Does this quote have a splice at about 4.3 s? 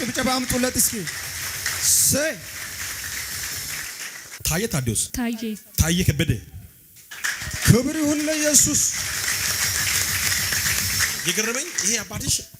yes; 2 cuts; at 4.3 s, 5.0 s

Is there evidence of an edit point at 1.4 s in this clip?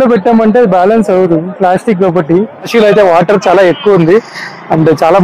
no; 1 cut; at 2.7 s

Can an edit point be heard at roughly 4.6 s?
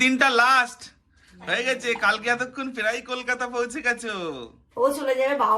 yes; 1 cut; at 4.6 s

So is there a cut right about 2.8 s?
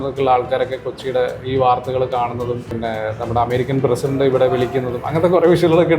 yes; 1 cut; at 2.8 s

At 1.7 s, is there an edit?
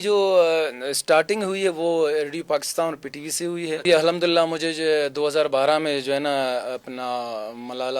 no; 1 cut; at 3.8 s

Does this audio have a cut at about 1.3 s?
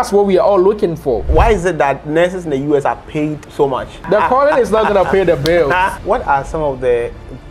yes; 3 cuts; at 1.3 s, 3.9 s, 6.0 s

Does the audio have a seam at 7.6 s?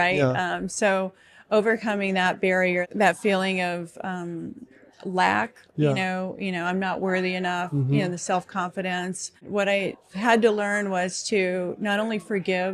no; 2 cuts; at 2.9 s, 9.5 s

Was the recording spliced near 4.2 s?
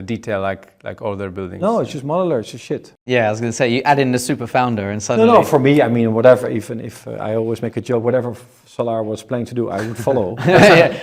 no; 1 cut; at 2.9 s

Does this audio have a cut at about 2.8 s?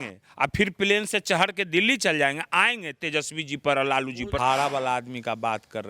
no; 1 cut; at 4.4 s

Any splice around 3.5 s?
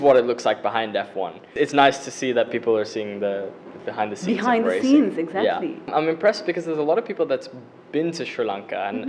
no; 2 cuts; at 1.5 s, 5.9 s

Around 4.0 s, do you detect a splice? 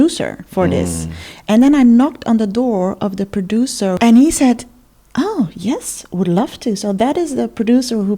yes; 1 cut; at 4.0 s

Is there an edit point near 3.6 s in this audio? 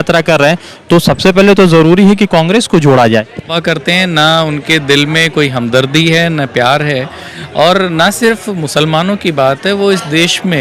yes; 1 cut; at 3.6 s

